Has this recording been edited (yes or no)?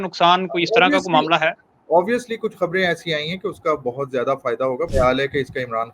yes